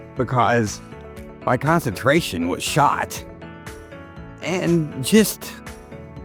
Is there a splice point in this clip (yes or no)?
no